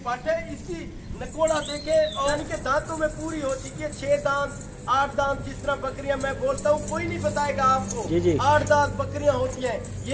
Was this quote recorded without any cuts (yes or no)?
no